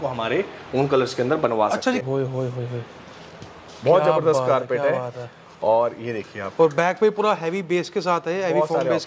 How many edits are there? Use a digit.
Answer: 1